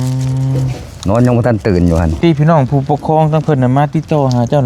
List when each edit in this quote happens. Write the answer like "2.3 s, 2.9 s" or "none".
2.1 s